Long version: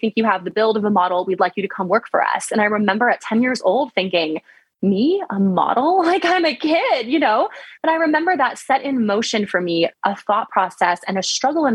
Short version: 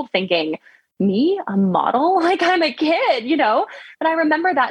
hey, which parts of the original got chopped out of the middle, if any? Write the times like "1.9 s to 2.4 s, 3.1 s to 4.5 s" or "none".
none